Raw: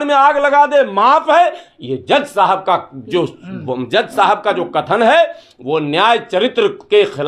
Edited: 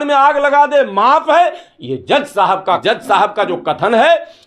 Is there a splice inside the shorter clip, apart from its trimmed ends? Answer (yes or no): yes